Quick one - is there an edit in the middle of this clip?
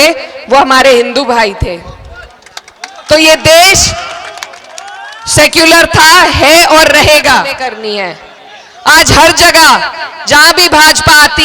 yes; 1 cut; at 7.6 s

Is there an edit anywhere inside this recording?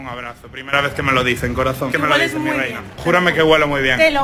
no; 0 cuts

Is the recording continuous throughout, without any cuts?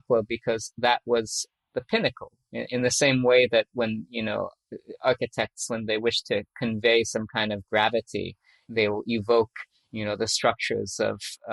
no; 4 cuts; at 1.5 s, 2.3 s, 4.6 s, 8.5 s

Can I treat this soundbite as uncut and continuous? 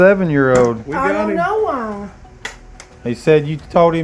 yes; 0 cuts

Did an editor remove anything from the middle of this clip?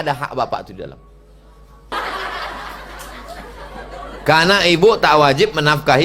yes; 1 cut; at 1.9 s

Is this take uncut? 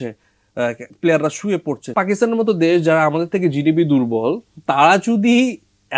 no; 1 cut; at 1.8 s

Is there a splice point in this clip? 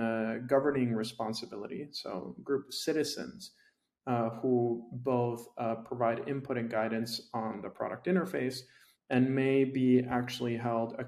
no; 0 cuts

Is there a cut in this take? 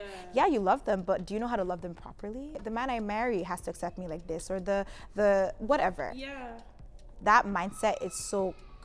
yes; 1 cut; at 2.6 s

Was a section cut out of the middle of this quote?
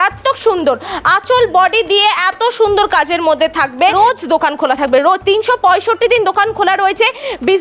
yes; 1 cut; at 3.9 s

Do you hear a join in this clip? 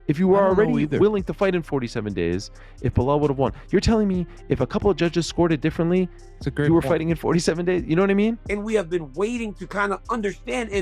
yes; 1 cut; at 8.4 s

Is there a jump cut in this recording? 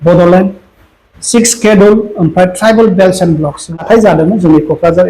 yes; 1 cut; at 3.8 s

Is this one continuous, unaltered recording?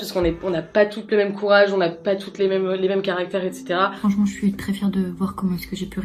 yes; 0 cuts

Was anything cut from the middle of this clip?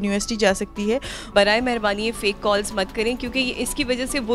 yes; 1 cut; at 1.3 s

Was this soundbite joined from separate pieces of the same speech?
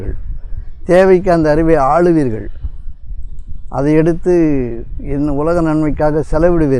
no; 0 cuts

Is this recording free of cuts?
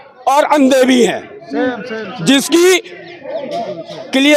yes; 0 cuts

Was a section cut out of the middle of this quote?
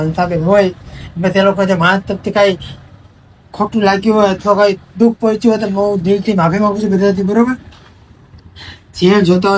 no; 0 cuts

